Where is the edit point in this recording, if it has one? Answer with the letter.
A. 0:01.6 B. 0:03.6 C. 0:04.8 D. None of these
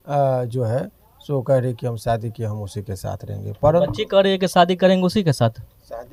D